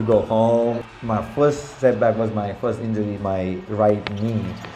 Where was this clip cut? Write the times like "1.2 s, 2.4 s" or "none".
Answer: 0.8 s, 3.2 s